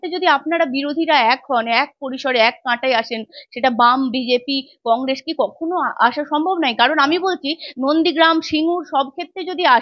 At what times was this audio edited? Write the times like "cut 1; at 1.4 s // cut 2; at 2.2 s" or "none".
none